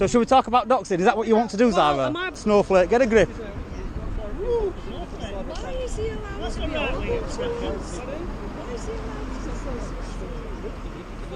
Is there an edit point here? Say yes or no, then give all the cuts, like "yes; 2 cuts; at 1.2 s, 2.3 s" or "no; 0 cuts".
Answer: yes; 1 cut; at 2.4 s